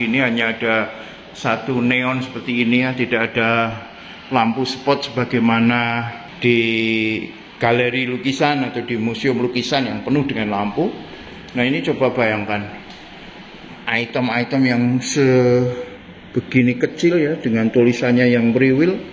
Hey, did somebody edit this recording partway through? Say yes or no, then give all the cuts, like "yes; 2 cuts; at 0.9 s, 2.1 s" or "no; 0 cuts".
yes; 1 cut; at 6.2 s